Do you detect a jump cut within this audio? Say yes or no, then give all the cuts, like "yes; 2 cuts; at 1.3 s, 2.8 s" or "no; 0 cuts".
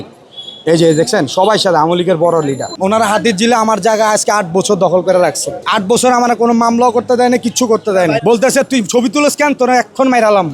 yes; 3 cuts; at 2.7 s, 5.6 s, 8.2 s